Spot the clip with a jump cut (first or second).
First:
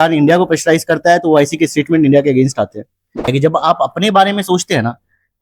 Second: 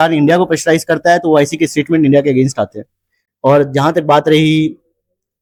first